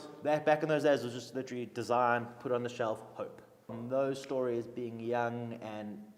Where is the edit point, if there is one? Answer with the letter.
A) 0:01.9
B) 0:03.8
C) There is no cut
B